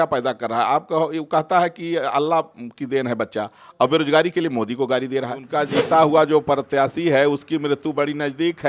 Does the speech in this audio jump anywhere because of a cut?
yes; 1 cut; at 5.4 s

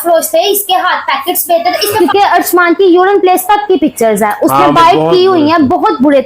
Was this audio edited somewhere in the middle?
yes; 1 cut; at 2.0 s

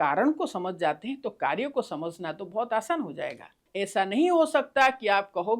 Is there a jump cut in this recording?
yes; 1 cut; at 3.6 s

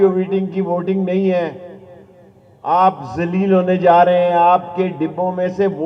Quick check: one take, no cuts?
yes; 0 cuts

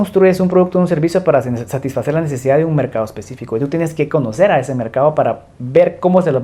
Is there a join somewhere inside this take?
no; 0 cuts

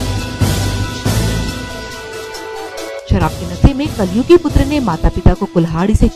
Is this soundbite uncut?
yes; 0 cuts

